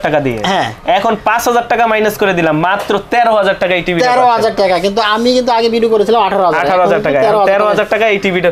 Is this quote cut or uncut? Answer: uncut